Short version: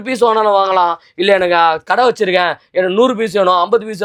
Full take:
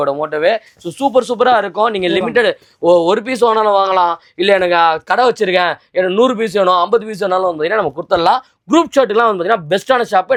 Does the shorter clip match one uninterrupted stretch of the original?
yes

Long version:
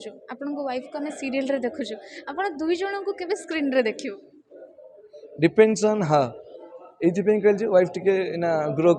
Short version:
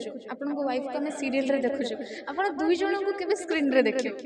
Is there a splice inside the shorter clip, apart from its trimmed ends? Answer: no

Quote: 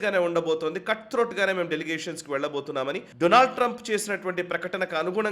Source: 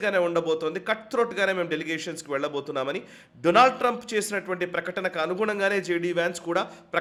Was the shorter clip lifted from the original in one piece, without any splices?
no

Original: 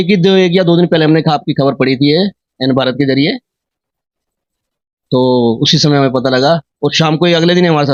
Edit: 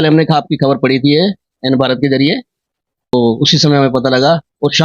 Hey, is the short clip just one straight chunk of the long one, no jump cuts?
no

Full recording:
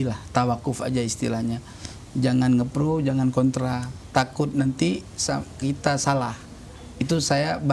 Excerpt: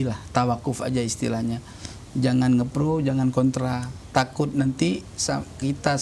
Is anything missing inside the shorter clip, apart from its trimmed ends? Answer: no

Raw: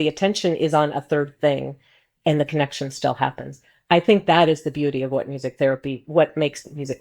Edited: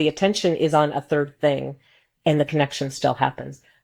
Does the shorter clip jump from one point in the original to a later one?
no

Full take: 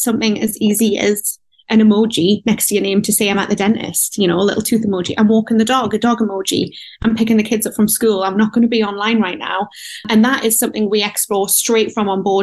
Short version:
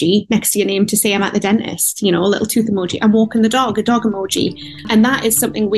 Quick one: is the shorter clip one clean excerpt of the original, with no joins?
no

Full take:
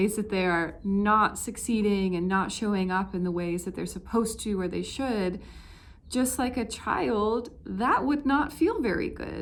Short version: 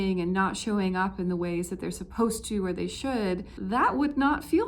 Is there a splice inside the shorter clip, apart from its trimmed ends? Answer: yes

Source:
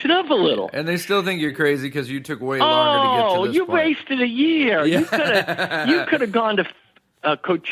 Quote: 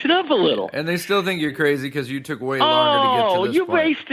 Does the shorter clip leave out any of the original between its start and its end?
no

